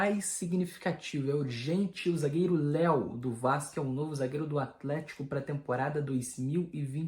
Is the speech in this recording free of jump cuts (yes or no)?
yes